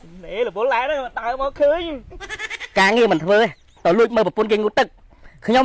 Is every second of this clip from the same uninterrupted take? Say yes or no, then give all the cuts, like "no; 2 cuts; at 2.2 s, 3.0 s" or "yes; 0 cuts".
yes; 0 cuts